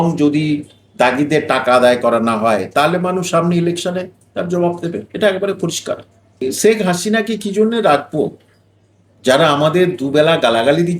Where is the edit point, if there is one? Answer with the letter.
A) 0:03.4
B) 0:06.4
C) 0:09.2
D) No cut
B